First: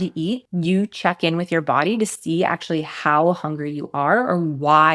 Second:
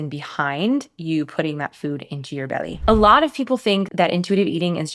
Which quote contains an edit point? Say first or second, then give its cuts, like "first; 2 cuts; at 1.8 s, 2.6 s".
second; 2 cuts; at 2.7 s, 3.9 s